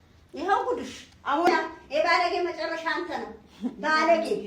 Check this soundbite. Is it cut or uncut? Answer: cut